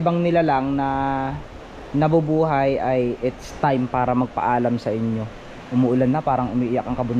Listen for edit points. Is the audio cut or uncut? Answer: uncut